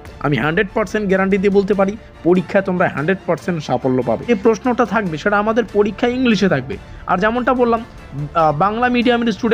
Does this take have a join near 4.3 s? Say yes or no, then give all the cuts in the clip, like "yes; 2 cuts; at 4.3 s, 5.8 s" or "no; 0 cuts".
yes; 1 cut; at 4.3 s